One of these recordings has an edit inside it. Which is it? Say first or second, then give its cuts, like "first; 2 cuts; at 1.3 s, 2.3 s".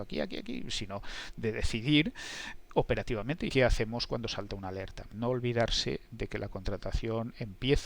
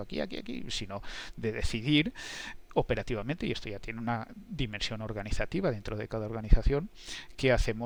first; 2 cuts; at 3.5 s, 5.0 s